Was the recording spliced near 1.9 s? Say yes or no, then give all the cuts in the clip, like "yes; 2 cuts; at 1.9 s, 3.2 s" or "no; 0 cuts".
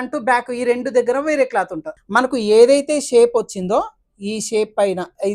yes; 1 cut; at 1.9 s